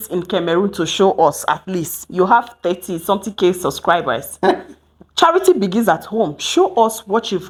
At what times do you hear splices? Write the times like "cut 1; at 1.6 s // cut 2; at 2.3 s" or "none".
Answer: none